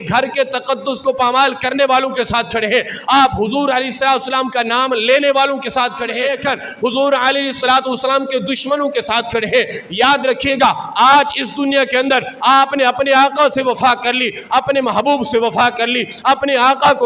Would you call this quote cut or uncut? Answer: cut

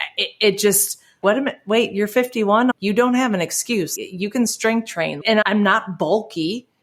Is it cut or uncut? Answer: cut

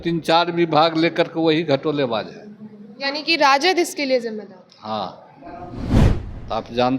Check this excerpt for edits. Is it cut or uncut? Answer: cut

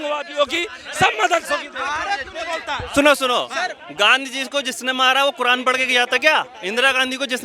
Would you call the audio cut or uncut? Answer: uncut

